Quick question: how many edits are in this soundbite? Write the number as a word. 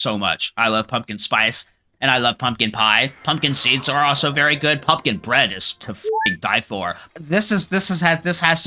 one